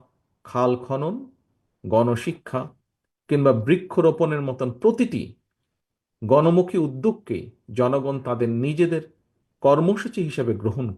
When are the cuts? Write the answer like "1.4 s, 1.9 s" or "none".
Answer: none